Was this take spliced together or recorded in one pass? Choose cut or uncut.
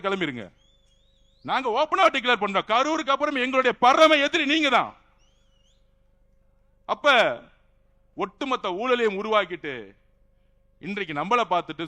uncut